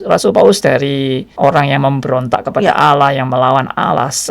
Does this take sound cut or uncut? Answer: cut